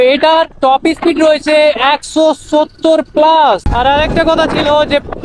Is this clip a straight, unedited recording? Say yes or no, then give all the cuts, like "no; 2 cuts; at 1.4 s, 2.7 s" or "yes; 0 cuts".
no; 1 cut; at 3.7 s